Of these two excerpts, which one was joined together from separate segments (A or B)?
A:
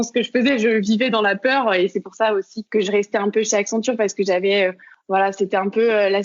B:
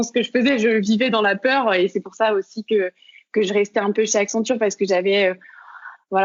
A